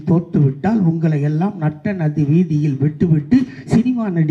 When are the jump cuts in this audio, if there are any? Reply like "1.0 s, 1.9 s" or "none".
none